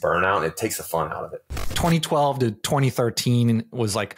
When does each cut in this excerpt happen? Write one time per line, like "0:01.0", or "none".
0:01.7

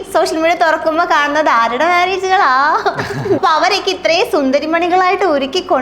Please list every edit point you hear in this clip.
0:03.4

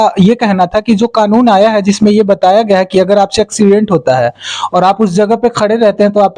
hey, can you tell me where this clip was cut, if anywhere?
none

